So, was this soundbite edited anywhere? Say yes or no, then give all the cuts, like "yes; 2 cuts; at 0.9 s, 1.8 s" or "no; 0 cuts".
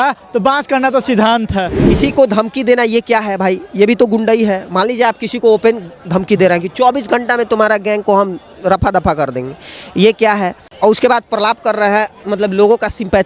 yes; 2 cuts; at 1.8 s, 10.7 s